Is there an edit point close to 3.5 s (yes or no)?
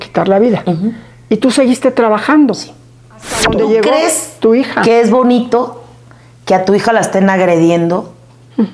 yes